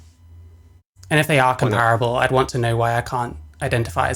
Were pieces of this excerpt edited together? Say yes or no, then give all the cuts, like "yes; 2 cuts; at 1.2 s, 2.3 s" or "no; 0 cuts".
no; 0 cuts